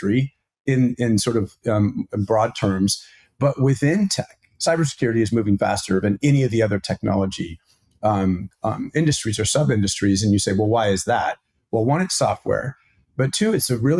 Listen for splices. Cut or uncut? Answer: uncut